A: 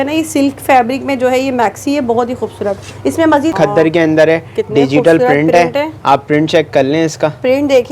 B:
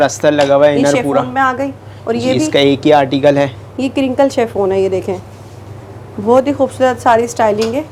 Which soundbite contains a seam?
A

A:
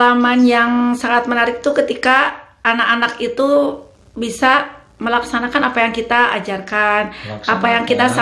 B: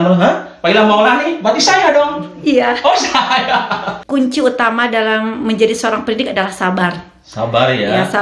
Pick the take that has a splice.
B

